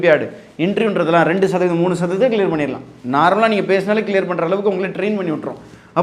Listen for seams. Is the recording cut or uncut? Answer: uncut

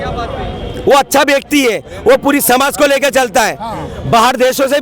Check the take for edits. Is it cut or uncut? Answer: uncut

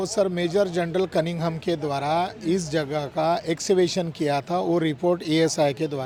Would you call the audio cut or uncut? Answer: uncut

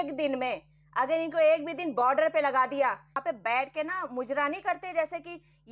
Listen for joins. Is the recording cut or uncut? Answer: cut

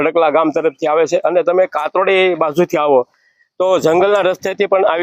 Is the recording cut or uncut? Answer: uncut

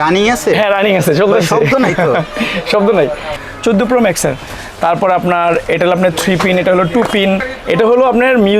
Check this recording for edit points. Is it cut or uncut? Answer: cut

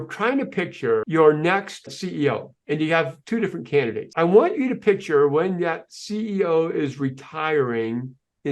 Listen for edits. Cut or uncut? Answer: cut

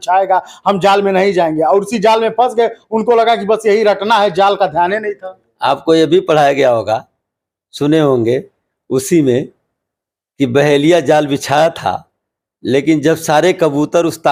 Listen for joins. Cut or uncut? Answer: uncut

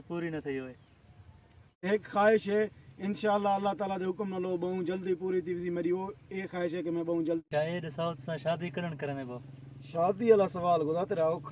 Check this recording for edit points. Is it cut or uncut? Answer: cut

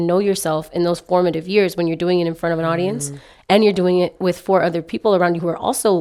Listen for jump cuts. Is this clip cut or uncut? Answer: uncut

